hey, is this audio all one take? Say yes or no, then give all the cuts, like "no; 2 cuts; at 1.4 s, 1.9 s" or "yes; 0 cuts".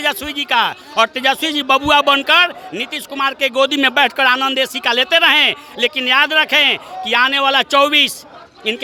yes; 0 cuts